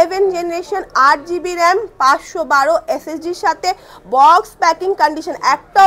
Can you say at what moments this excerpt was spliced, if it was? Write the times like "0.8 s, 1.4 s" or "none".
none